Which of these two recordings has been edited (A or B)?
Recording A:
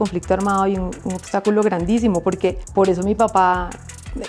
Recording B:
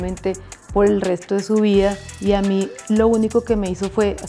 A